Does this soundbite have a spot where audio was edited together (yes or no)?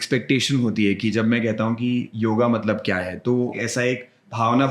yes